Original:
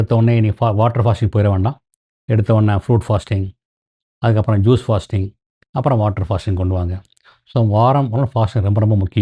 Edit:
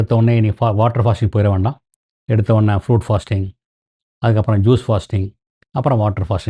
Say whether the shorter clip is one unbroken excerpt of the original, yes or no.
yes